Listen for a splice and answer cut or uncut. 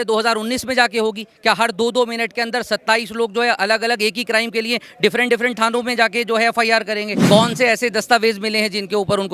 cut